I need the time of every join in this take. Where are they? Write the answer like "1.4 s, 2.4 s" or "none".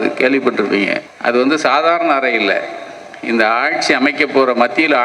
1.0 s